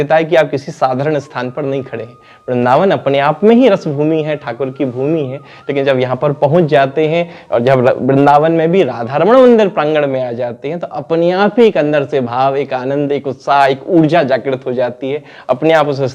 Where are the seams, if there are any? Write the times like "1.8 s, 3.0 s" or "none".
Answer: none